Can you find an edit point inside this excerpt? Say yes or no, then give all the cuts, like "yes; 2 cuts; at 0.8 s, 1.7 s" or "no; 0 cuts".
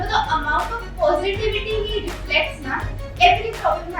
yes; 1 cut; at 3.0 s